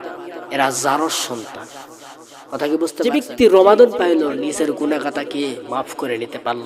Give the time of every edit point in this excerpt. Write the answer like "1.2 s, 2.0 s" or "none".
3.1 s